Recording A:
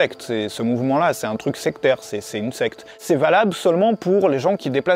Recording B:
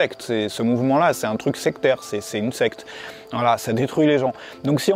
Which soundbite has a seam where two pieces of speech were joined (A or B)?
A